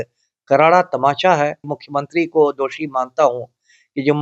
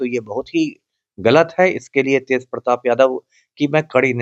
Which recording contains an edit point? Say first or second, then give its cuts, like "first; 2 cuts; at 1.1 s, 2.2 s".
first; 1 cut; at 1.8 s